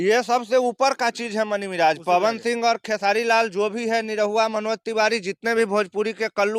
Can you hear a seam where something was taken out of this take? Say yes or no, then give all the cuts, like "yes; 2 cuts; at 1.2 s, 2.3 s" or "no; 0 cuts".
no; 0 cuts